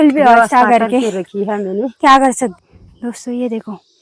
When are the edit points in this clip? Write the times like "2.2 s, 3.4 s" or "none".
2.5 s